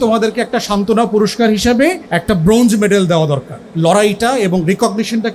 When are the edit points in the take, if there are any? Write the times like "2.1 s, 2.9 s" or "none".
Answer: 2.1 s, 3.6 s

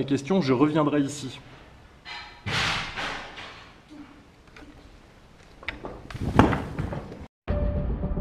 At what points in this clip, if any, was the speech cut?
7.3 s

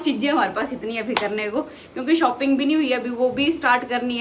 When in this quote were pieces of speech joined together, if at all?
none

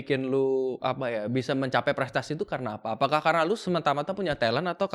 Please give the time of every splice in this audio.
none

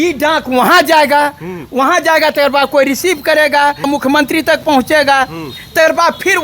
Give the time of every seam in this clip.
3.9 s

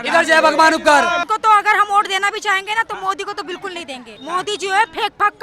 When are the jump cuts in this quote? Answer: 1.3 s, 4.2 s

